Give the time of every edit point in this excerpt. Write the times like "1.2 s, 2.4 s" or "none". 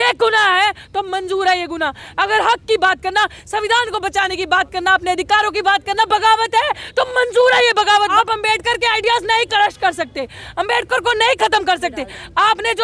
8.1 s